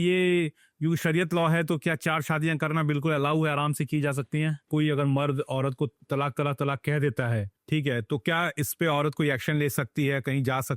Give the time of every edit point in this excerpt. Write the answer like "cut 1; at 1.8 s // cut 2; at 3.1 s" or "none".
cut 1; at 4.7 s // cut 2; at 6.0 s // cut 3; at 7.5 s

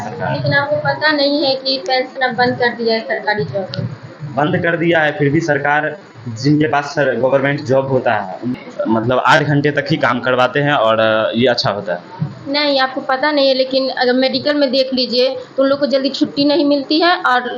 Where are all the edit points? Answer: cut 1; at 8.5 s

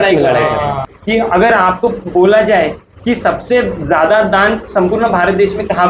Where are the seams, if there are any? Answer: cut 1; at 0.9 s

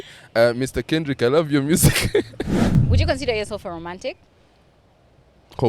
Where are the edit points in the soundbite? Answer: cut 1; at 2.6 s

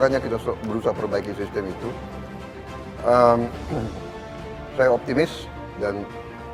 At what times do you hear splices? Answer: none

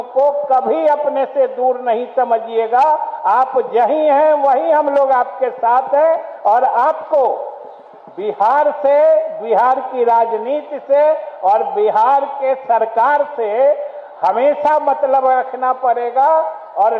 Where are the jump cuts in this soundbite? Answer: none

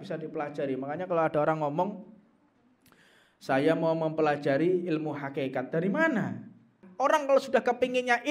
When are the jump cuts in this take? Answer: cut 1; at 6.8 s

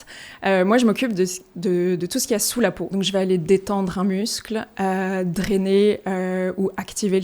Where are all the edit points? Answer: cut 1; at 2.9 s

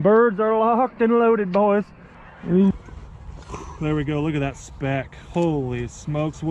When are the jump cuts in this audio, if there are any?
cut 1; at 2.7 s

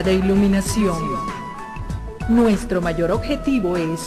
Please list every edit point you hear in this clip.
none

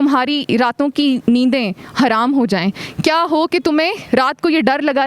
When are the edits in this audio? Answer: none

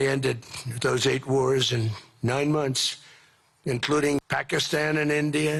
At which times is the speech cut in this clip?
none

